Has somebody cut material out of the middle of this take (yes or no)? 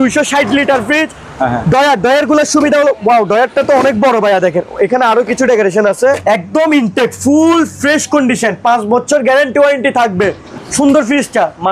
yes